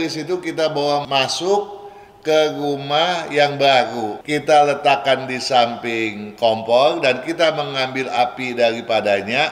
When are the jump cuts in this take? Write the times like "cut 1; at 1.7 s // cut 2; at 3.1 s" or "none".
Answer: cut 1; at 1.1 s // cut 2; at 4.1 s